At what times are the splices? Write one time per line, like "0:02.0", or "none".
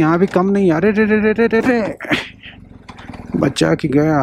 none